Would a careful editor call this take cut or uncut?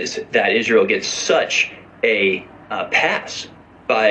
cut